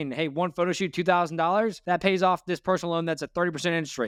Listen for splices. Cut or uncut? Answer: uncut